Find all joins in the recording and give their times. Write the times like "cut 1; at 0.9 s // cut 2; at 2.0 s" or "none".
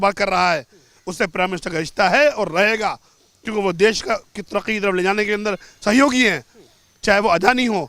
none